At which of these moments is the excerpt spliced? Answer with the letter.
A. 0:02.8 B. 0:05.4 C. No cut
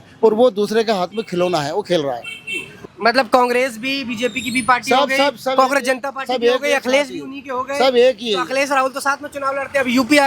A